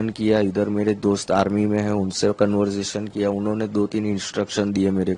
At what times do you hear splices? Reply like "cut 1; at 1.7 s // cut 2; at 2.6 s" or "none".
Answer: none